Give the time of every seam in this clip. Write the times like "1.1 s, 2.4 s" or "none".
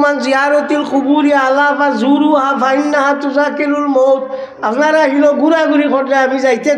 none